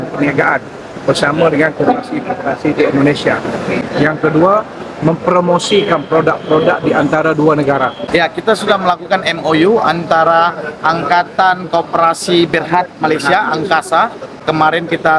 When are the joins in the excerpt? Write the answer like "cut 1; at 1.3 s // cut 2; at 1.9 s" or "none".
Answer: cut 1; at 3.8 s // cut 2; at 8.1 s // cut 3; at 14.3 s